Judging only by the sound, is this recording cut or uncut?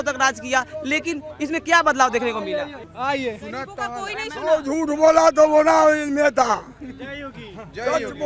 cut